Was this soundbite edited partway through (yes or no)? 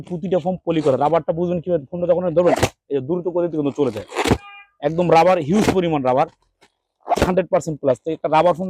no